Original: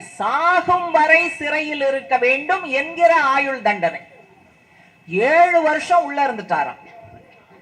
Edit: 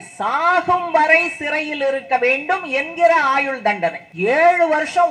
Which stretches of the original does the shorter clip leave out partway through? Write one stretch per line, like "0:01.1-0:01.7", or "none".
0:04.1-0:05.0